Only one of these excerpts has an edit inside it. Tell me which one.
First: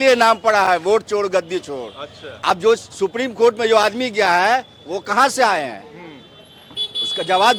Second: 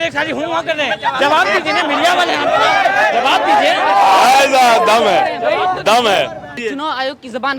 second; 1 cut; at 6.6 s

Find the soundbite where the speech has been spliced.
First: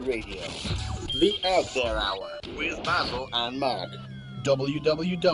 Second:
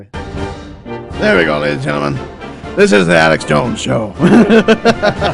second; 1 cut; at 4.1 s

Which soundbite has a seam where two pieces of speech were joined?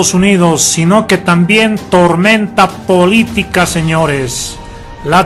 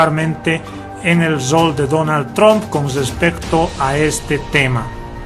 second; 1 cut; at 3.4 s

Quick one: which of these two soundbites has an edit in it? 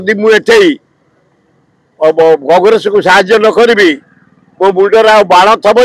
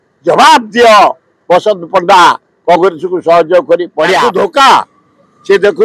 second; 1 cut; at 4.2 s

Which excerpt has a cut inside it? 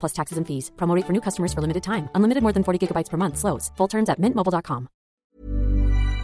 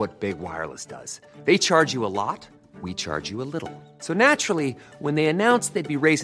first; 1 cut; at 5.3 s

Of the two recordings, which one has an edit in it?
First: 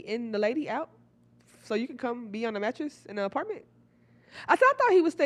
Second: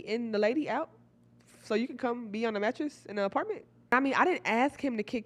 second; 1 cut; at 3.9 s

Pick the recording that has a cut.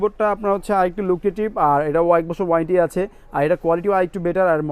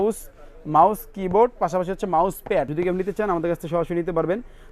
second; 1 cut; at 2.7 s

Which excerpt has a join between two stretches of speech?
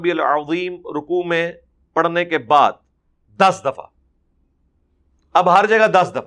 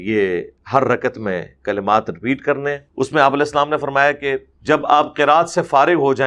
second; 2 cuts; at 2.8 s, 4.5 s

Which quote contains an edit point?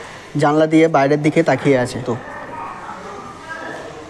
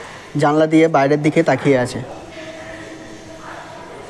first; 1 cut; at 2.0 s

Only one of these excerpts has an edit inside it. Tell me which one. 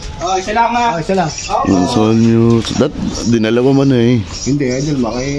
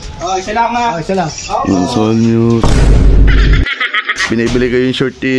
second; 2 cuts; at 2.6 s, 4.1 s

